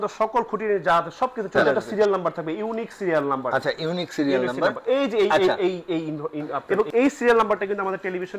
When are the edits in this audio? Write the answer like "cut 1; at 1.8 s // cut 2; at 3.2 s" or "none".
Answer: cut 1; at 1.6 s // cut 2; at 6.6 s